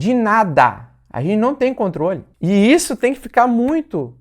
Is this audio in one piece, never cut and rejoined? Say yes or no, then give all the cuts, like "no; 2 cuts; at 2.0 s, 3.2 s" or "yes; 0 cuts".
no; 1 cut; at 2.3 s